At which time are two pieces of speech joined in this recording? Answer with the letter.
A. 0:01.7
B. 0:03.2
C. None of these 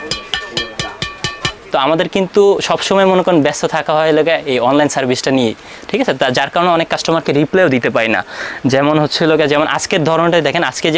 A